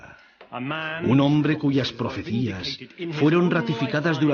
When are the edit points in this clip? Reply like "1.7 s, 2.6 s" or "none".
none